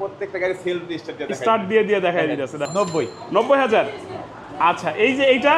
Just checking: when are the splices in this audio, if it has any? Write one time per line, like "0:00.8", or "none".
0:02.7